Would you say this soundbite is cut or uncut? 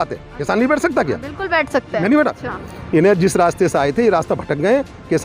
cut